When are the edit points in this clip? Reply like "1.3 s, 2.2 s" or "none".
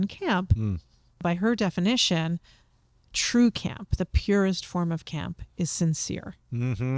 1.2 s